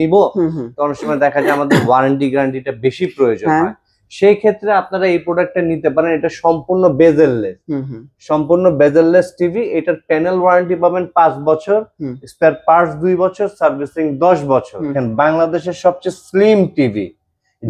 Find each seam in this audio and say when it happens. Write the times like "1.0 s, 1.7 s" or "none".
15.0 s